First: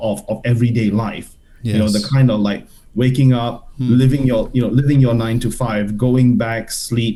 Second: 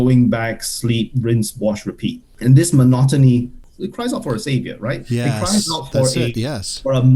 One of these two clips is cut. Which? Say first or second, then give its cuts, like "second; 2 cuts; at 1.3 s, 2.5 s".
second; 2 cuts; at 2.3 s, 3.7 s